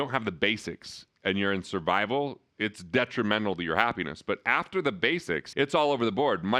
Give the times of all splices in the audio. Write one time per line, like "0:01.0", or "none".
none